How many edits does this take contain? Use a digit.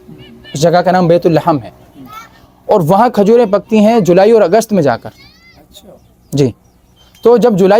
0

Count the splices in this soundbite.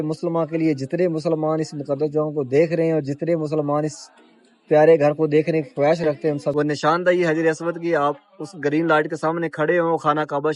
1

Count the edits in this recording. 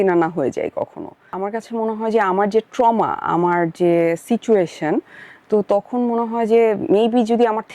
1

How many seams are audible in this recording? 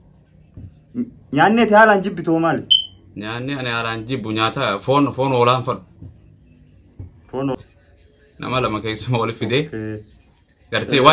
1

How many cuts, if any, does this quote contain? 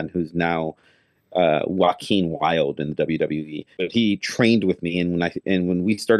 1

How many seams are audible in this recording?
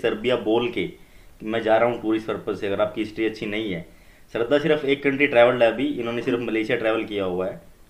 0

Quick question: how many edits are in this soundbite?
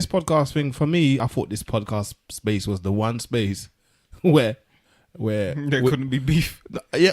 1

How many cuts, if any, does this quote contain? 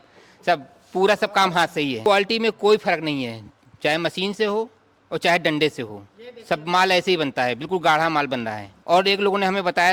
2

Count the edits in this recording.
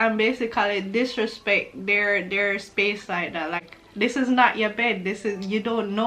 1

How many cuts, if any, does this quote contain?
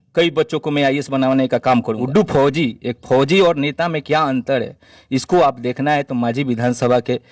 1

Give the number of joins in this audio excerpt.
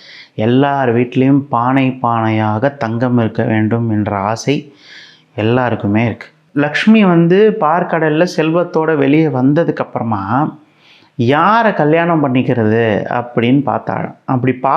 1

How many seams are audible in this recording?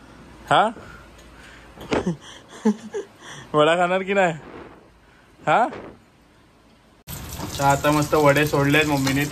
1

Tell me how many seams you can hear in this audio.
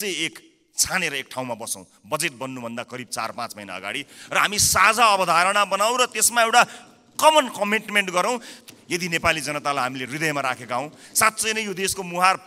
1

